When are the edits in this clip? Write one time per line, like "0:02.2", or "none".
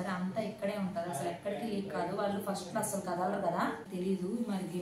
0:03.9

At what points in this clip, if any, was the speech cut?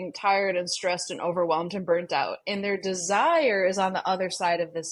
none

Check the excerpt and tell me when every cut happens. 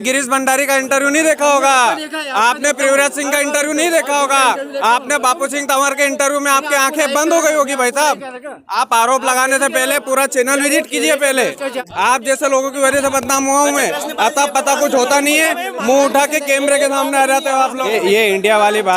0:11.7
0:17.9

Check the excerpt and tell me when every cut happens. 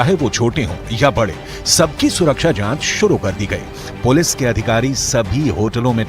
0:01.9

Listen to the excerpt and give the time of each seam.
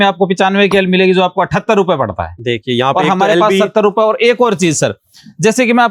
none

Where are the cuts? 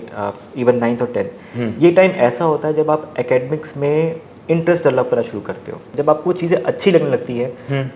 0:05.9

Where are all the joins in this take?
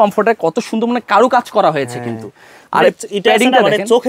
none

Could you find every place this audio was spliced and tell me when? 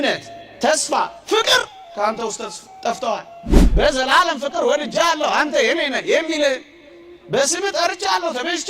0:03.6

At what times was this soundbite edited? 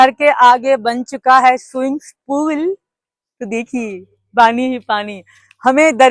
none

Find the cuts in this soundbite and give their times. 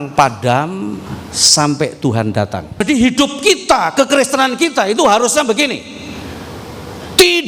0:02.8

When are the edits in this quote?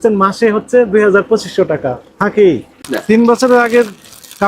0:02.7

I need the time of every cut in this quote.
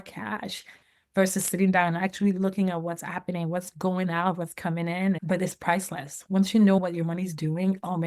0:05.2
0:06.8

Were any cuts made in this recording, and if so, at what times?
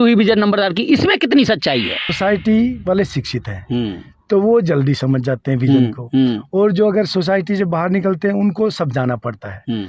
0:02.1

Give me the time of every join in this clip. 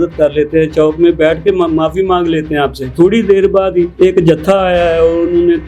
0:02.9
0:03.9

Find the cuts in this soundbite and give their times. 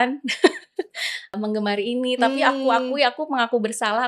0:01.3

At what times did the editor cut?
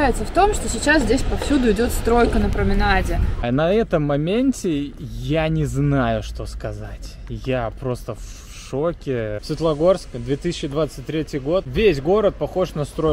0:03.2
0:09.4
0:11.7

